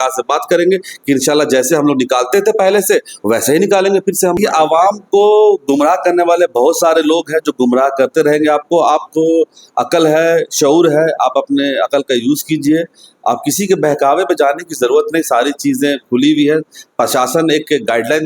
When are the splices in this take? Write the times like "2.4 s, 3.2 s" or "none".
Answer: 4.4 s